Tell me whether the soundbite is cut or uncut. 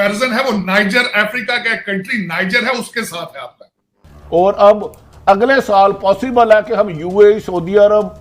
cut